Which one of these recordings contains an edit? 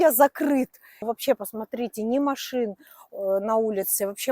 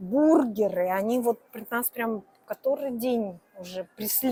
first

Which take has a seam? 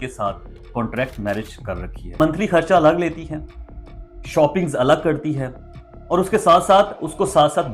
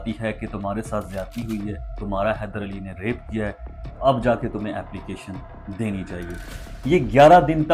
first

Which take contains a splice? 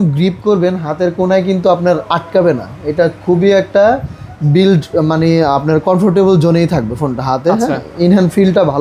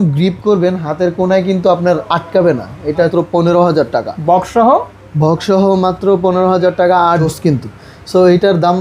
second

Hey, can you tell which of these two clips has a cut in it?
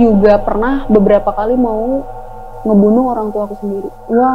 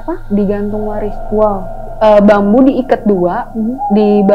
second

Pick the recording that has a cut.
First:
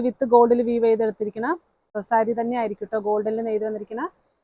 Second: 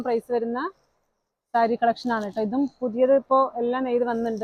first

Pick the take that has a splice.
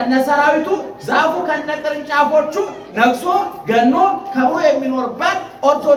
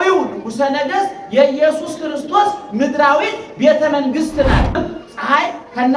second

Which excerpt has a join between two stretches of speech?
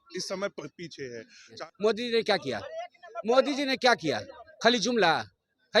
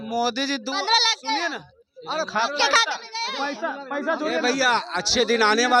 first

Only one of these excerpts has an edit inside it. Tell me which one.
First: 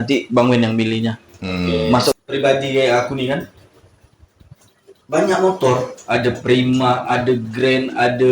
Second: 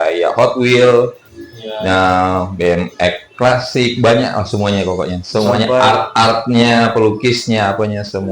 first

